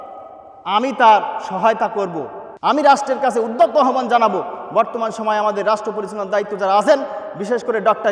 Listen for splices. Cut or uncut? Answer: cut